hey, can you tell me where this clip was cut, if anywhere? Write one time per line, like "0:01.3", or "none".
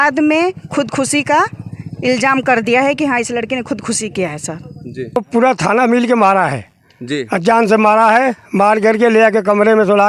0:05.2